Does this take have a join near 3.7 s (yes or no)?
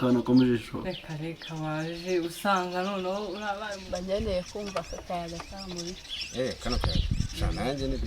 yes